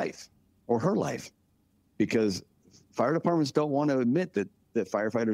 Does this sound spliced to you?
no; 0 cuts

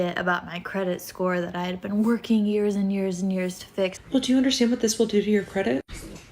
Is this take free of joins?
no; 1 cut; at 4.0 s

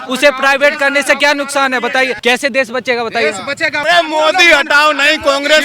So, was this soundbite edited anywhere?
yes; 2 cuts; at 2.1 s, 3.8 s

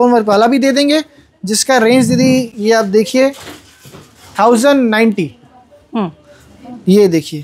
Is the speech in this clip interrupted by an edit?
no; 0 cuts

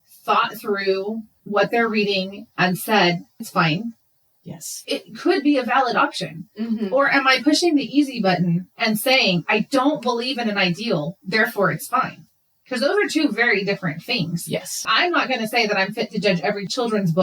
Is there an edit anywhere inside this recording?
yes; 2 cuts; at 3.4 s, 4.8 s

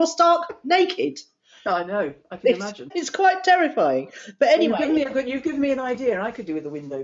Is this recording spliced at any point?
yes; 1 cut; at 2.9 s

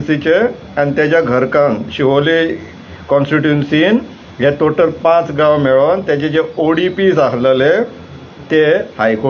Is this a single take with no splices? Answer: yes; 0 cuts

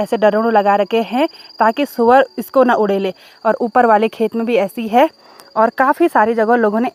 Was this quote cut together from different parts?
no; 0 cuts

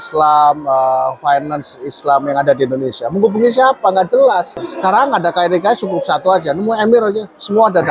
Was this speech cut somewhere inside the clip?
yes; 1 cut; at 4.7 s

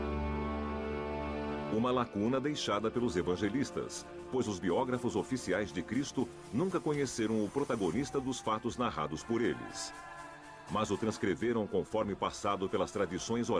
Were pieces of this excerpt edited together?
yes; 1 cut; at 11.4 s

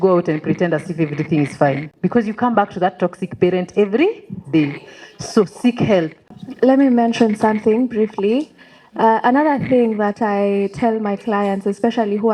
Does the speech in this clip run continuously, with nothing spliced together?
yes; 0 cuts

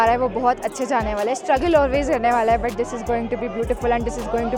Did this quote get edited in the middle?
no; 0 cuts

